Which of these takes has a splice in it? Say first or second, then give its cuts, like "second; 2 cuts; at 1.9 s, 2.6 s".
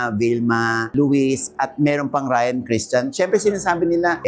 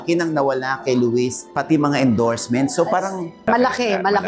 second; 2 cuts; at 1.4 s, 3.3 s